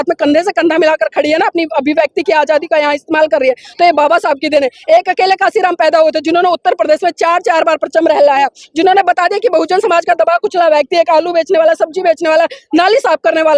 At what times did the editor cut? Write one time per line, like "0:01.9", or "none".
none